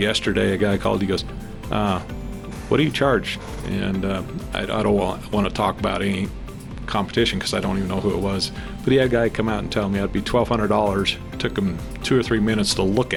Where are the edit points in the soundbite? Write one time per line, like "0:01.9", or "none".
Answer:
none